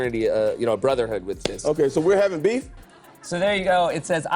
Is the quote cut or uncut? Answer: cut